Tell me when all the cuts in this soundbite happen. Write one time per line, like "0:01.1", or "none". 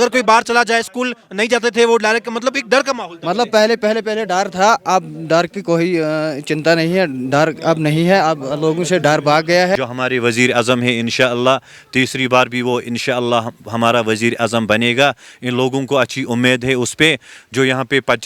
0:09.7

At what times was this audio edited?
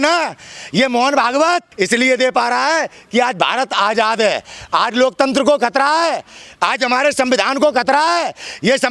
none

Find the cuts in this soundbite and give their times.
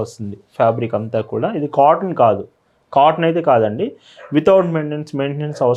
none

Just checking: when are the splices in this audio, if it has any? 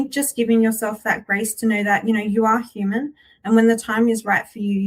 none

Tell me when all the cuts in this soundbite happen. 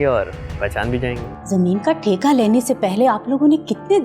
0:01.3

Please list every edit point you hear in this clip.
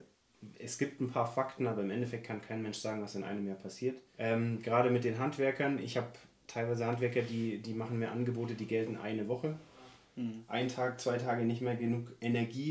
0:04.1
0:10.0

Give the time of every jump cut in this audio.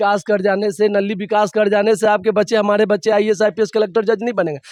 none

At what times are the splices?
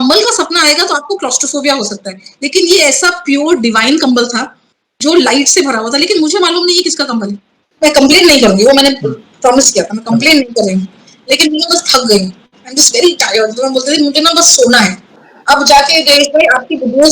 0:07.7

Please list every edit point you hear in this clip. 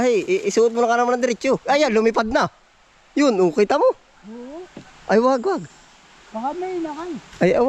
none

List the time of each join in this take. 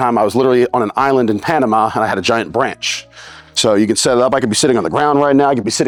none

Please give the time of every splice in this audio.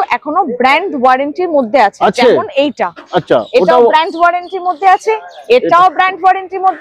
none

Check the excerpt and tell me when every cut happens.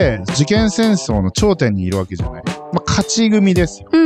none

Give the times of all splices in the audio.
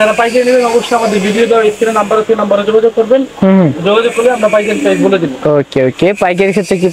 none

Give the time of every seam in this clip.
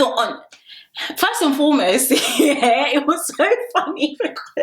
none

